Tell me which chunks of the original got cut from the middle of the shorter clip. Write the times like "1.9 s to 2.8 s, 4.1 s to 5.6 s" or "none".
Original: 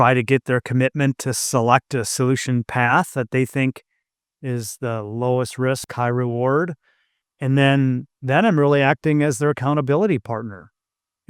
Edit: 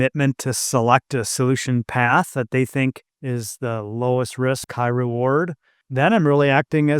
3.9 s to 4.3 s, 7.0 s to 8.1 s